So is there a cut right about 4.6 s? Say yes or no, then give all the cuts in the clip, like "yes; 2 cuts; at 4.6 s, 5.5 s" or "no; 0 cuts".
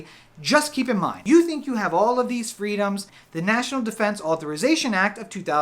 no; 2 cuts; at 1.2 s, 3.2 s